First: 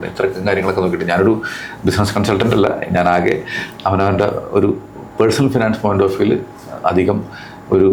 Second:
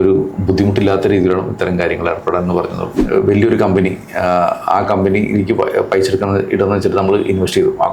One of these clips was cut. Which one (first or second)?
second